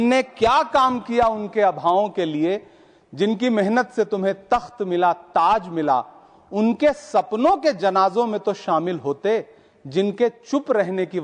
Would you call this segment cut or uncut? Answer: uncut